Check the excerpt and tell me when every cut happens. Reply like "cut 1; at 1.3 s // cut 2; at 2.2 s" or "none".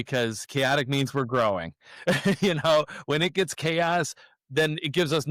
none